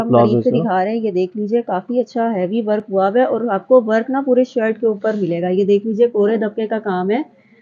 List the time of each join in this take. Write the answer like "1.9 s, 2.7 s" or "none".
none